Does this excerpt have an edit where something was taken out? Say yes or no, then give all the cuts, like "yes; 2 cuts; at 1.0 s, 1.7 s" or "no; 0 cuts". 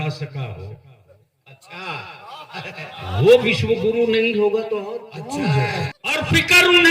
yes; 1 cut; at 6.0 s